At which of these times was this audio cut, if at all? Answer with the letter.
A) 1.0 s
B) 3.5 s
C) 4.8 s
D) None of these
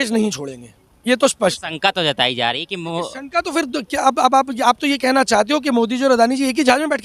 D